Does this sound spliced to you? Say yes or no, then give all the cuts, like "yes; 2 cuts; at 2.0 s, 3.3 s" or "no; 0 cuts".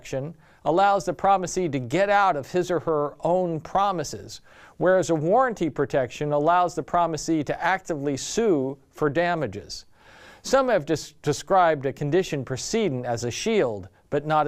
no; 0 cuts